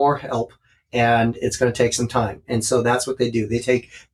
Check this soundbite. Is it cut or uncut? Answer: uncut